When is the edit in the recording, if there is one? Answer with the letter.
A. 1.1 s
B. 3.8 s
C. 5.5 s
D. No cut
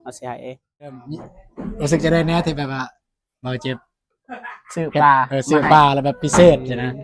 A